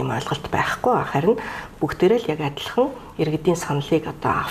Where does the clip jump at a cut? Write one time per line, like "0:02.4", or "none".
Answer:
none

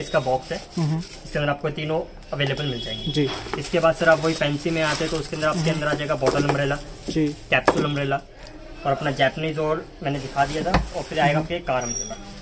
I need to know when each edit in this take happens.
none

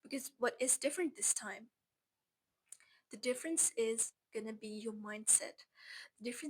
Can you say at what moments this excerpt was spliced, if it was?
0:04.2

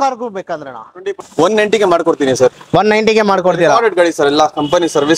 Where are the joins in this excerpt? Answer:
0:01.2

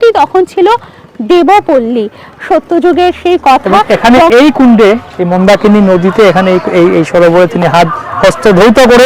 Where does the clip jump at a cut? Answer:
0:03.7

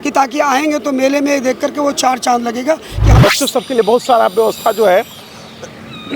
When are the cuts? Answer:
0:03.2

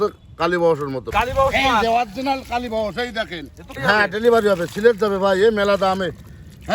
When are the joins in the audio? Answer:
0:01.1
0:03.7

